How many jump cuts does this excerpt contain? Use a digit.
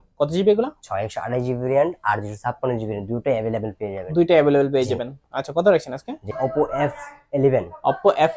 1